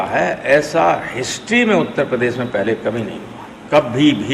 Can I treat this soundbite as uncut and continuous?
yes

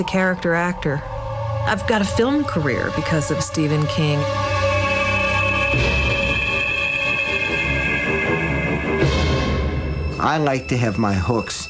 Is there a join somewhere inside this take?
no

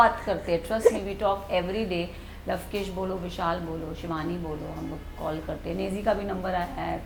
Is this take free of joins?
yes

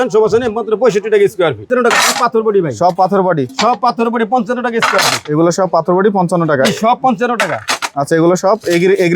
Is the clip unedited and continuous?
no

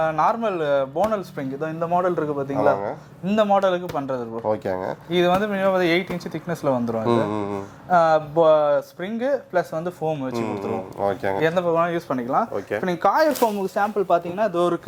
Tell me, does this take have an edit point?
no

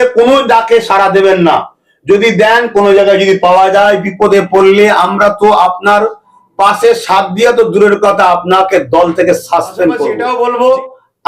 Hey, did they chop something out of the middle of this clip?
yes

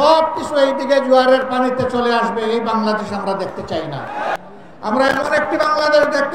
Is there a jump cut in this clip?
yes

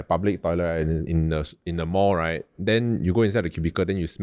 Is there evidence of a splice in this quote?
no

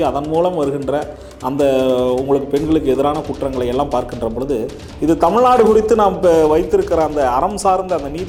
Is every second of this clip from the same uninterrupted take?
yes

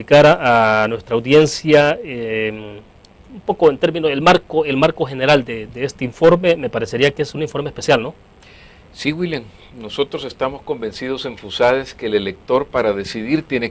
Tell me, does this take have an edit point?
yes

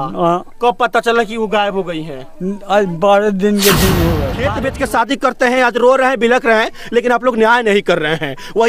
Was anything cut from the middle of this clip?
yes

